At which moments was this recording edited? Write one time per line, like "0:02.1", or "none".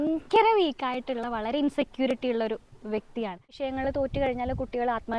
0:03.6